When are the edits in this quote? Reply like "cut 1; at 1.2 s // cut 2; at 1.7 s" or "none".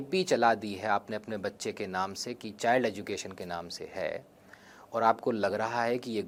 none

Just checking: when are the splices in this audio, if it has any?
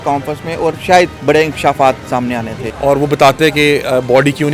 cut 1; at 2.6 s

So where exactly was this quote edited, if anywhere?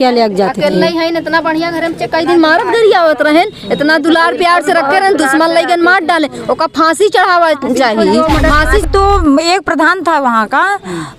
cut 1; at 8.8 s

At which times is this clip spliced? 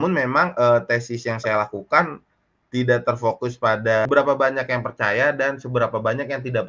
cut 1; at 4.1 s

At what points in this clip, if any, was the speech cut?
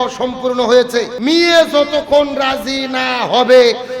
cut 1; at 1.1 s

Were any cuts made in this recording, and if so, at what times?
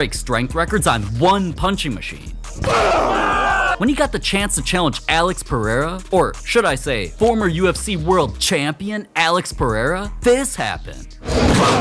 cut 1; at 3.7 s

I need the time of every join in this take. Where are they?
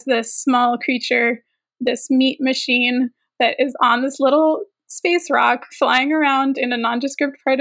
none

